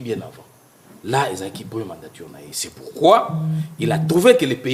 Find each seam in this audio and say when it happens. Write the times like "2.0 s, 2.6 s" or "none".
none